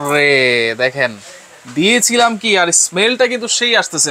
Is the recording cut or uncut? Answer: uncut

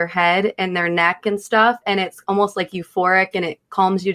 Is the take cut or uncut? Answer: uncut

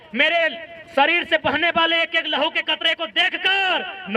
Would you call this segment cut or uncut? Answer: uncut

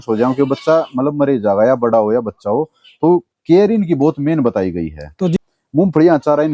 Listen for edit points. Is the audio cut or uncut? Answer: cut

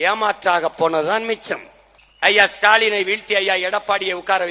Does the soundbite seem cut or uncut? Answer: cut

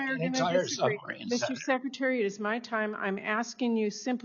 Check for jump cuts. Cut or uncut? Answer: uncut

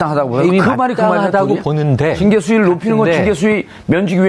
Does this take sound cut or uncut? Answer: uncut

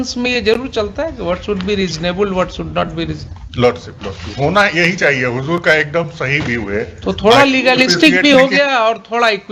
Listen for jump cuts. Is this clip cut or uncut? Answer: uncut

